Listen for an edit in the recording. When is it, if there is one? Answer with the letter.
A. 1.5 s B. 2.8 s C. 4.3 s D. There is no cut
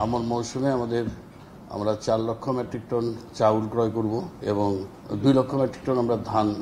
C